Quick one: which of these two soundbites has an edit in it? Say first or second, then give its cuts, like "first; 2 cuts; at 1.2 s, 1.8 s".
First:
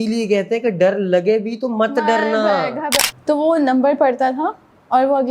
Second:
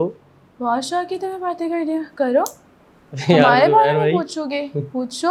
first; 1 cut; at 3.0 s